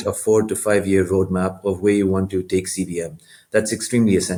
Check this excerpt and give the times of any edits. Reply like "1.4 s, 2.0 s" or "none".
none